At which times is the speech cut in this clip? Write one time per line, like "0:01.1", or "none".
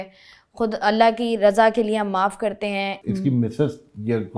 0:03.0